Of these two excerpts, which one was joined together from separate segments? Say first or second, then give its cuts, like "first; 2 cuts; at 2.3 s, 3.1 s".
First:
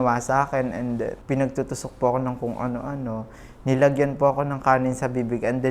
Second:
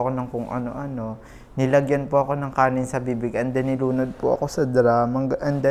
first; 1 cut; at 1.2 s